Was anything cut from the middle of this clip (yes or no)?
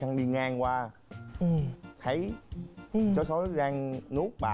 no